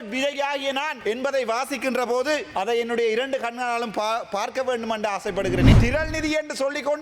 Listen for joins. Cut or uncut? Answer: cut